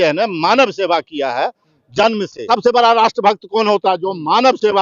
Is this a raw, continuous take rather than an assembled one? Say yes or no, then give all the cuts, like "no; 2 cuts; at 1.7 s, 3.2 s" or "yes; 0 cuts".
no; 1 cut; at 2.4 s